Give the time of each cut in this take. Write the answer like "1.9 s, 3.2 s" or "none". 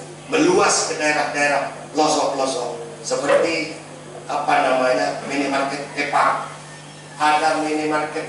none